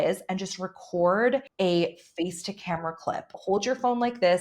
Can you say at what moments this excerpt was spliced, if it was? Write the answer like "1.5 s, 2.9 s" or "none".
1.5 s, 3.4 s